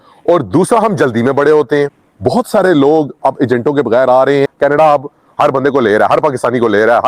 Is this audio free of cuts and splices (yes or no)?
no